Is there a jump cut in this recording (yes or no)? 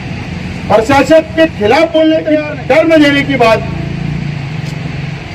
yes